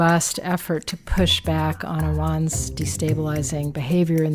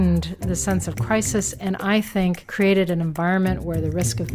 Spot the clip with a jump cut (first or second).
second